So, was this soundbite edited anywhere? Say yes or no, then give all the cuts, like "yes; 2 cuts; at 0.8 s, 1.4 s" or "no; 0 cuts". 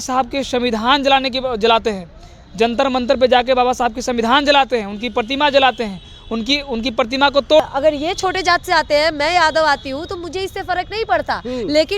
yes; 1 cut; at 7.6 s